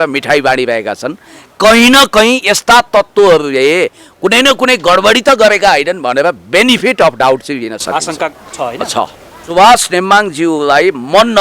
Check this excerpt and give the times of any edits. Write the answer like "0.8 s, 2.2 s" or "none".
9.4 s